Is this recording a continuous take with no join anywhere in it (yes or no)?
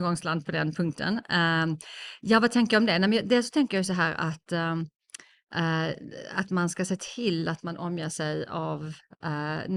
yes